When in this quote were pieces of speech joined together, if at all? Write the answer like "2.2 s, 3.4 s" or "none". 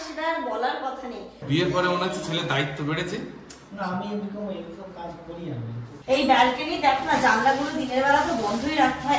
1.3 s, 5.9 s